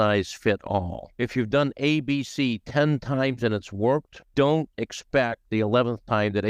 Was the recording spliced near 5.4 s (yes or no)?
yes